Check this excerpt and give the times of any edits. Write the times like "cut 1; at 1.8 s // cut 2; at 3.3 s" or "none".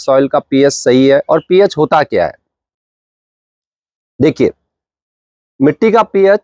none